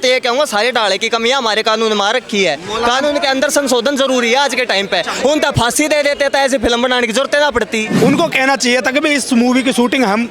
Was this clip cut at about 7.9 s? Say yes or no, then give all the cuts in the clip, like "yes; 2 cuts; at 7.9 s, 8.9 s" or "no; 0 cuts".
yes; 1 cut; at 7.9 s